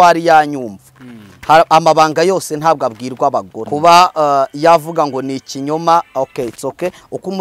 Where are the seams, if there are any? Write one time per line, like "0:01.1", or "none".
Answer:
0:03.6